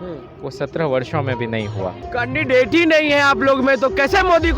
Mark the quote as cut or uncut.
cut